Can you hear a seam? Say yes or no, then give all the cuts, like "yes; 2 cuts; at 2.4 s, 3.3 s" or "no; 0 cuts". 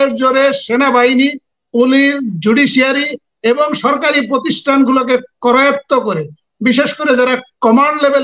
no; 0 cuts